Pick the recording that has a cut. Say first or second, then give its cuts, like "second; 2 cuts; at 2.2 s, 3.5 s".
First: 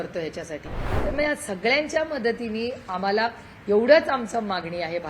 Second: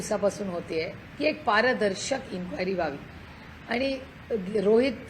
first; 1 cut; at 0.9 s